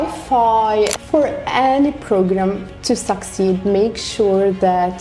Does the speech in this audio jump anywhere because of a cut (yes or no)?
yes